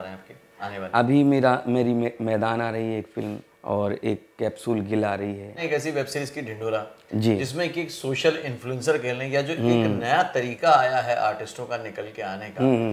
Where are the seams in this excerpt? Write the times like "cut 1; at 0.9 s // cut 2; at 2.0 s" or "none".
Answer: cut 1; at 3.5 s // cut 2; at 5.6 s